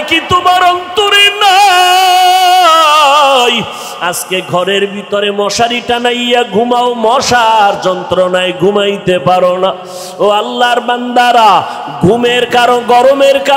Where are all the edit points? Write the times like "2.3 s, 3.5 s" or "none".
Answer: none